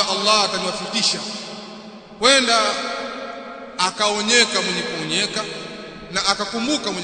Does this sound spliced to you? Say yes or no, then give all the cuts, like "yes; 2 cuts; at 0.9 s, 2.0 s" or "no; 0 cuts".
no; 0 cuts